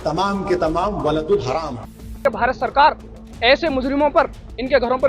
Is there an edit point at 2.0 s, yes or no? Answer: yes